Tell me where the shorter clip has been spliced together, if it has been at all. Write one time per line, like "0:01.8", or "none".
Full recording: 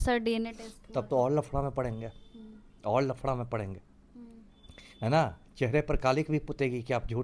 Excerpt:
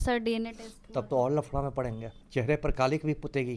0:02.2